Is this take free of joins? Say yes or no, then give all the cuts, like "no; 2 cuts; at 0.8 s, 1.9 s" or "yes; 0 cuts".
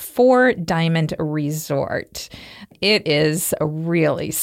no; 1 cut; at 2.8 s